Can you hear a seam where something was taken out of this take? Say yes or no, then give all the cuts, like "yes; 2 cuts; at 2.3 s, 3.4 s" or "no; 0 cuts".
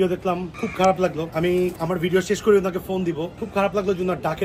yes; 1 cut; at 1.5 s